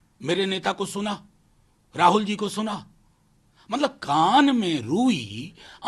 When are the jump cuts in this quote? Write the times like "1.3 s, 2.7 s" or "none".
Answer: none